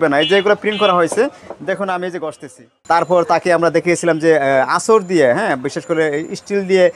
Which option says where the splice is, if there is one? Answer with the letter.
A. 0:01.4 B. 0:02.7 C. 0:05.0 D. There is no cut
B